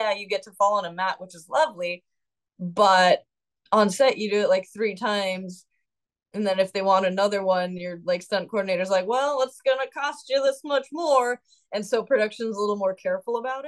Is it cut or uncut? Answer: uncut